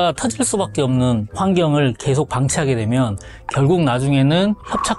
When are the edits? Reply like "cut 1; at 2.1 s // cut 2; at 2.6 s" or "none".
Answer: cut 1; at 1.3 s